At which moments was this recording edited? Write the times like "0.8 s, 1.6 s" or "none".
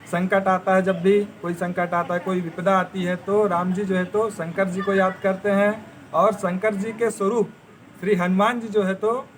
none

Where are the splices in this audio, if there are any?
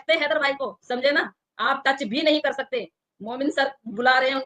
none

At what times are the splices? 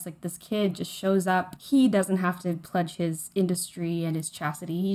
1.6 s

